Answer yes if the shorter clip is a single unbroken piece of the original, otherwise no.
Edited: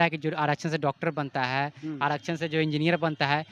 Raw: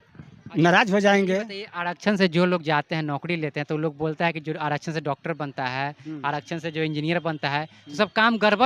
yes